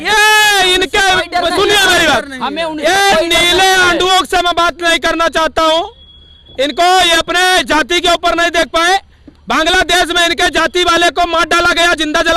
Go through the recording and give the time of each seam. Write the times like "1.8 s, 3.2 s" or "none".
none